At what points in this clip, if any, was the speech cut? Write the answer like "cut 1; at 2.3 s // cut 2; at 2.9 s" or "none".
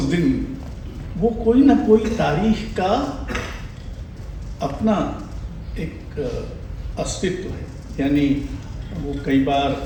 none

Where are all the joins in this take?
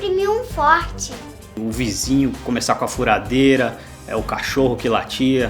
cut 1; at 1.6 s

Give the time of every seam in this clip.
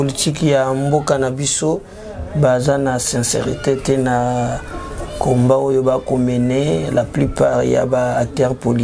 none

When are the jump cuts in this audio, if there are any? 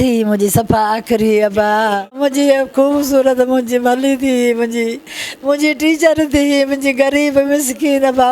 cut 1; at 2.2 s

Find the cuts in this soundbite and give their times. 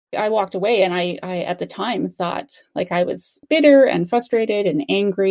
none

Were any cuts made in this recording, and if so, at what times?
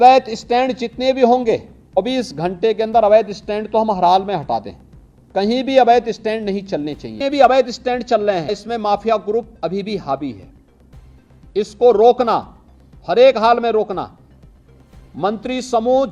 cut 1; at 2.0 s // cut 2; at 7.1 s // cut 3; at 8.6 s

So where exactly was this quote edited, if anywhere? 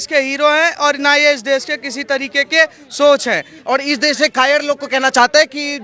cut 1; at 3.5 s

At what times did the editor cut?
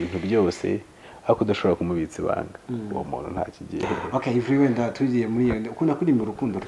cut 1; at 3.8 s

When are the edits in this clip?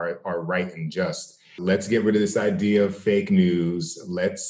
cut 1; at 1.5 s

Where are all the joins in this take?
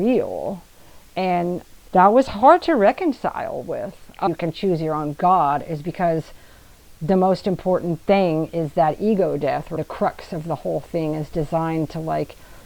cut 1; at 1.7 s // cut 2; at 4.3 s // cut 3; at 9.7 s

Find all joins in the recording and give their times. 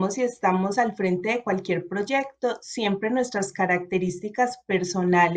none

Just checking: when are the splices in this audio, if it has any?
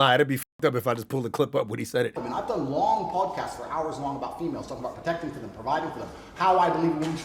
cut 1; at 2.2 s

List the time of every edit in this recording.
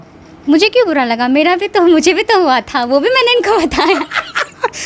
none

